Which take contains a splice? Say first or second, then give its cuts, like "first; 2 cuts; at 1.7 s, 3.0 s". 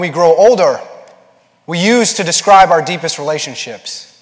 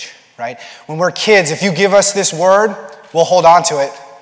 second; 1 cut; at 1.9 s